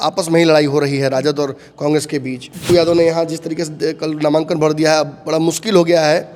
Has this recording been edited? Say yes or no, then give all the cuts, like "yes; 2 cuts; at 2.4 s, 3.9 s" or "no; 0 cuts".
yes; 1 cut; at 2.5 s